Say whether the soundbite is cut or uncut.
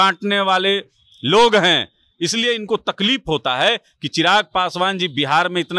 uncut